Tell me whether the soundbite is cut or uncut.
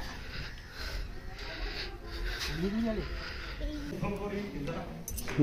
cut